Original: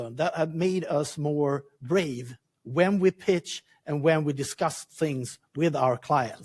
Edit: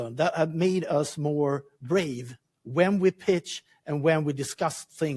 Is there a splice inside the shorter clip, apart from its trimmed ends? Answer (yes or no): no